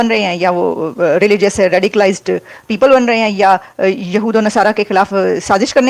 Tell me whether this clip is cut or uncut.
uncut